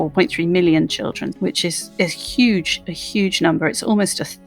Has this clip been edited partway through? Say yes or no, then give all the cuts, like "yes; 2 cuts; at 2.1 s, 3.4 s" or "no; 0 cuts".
yes; 1 cut; at 1.3 s